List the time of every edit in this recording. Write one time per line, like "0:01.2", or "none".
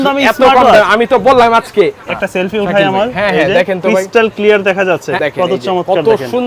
0:02.0
0:05.2